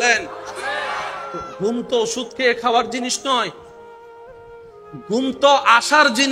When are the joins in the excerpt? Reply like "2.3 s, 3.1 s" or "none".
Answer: 3.6 s, 5.1 s